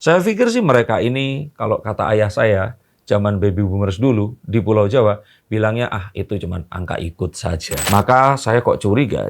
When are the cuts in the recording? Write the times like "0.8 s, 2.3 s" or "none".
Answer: 7.8 s

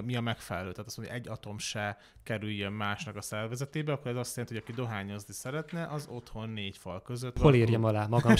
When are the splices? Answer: 7.3 s

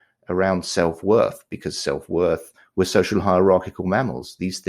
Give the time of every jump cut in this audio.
none

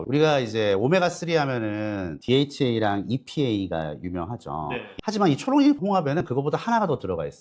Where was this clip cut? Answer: 4.9 s

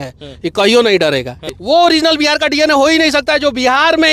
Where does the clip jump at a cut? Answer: 1.4 s

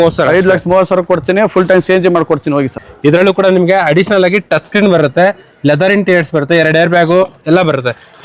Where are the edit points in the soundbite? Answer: 2.8 s

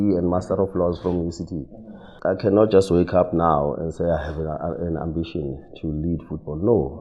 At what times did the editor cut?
2.1 s

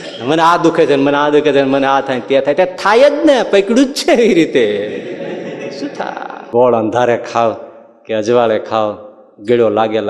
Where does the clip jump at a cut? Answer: 6.3 s

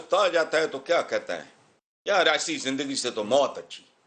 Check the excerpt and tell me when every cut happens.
none

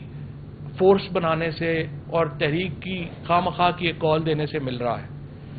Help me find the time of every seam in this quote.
none

